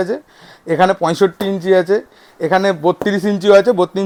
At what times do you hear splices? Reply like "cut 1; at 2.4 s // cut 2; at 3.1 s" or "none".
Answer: none

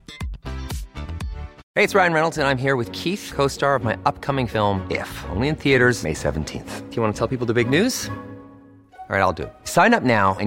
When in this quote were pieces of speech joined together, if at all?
none

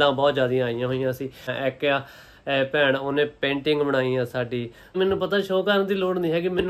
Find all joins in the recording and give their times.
cut 1; at 1.5 s // cut 2; at 4.9 s

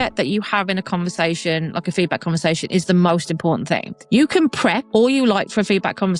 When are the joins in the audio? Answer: cut 1; at 3.9 s // cut 2; at 4.8 s

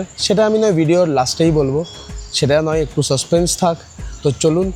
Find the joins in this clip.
none

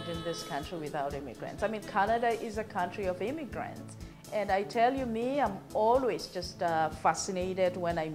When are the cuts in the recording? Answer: none

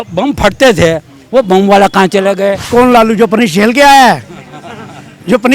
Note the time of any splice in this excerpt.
cut 1; at 2.6 s

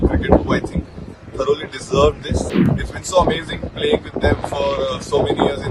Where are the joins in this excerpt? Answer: cut 1; at 2.6 s

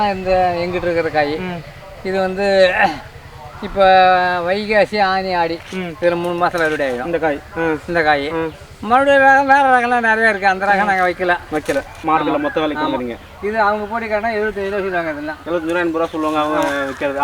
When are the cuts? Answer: cut 1; at 11.9 s

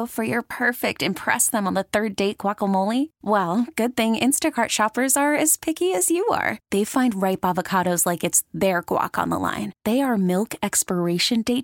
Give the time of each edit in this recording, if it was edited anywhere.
none

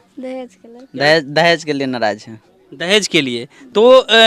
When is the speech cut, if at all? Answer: none

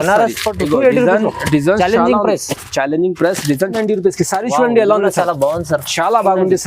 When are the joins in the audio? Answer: cut 1; at 3.7 s

